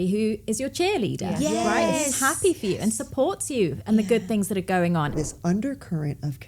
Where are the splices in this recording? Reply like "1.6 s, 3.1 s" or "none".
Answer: 5.1 s